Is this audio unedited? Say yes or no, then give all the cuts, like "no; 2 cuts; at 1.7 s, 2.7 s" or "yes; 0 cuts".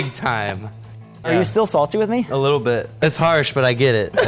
no; 2 cuts; at 1.2 s, 3.0 s